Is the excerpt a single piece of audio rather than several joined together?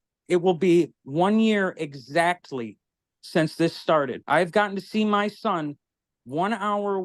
no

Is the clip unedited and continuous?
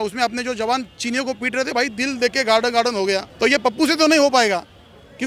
no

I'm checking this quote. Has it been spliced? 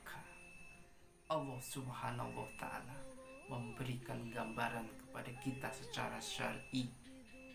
no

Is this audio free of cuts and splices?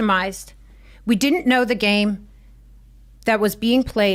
yes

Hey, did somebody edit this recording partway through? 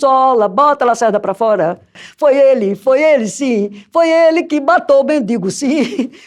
yes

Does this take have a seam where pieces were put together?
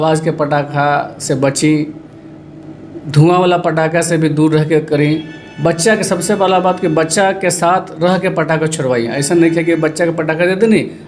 no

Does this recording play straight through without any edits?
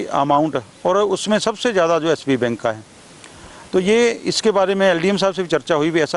yes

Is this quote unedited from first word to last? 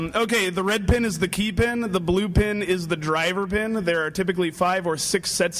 yes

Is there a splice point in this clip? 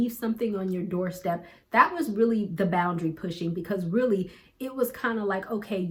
no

